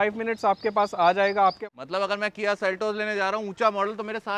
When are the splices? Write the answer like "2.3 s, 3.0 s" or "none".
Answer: 1.6 s